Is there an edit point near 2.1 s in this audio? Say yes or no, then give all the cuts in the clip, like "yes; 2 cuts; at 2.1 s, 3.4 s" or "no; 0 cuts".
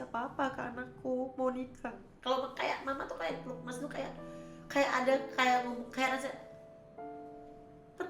yes; 1 cut; at 2.1 s